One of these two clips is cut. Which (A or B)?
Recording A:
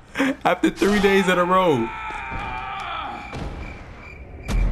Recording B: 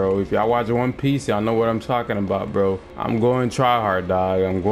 B